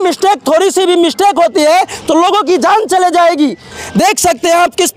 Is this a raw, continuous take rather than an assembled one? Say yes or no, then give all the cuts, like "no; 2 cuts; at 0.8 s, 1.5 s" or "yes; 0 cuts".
yes; 0 cuts